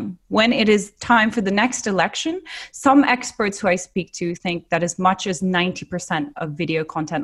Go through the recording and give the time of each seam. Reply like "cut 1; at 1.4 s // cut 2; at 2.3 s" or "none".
none